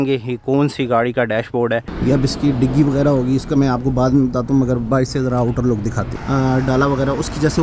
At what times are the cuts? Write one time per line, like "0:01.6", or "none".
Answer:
0:01.9
0:06.1